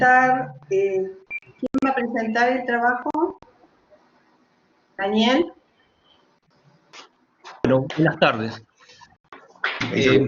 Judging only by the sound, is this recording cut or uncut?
cut